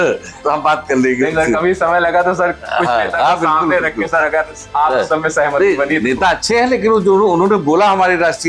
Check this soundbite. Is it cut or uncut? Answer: uncut